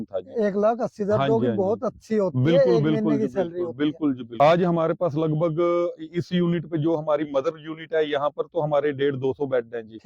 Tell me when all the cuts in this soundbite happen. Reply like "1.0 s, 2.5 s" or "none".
4.3 s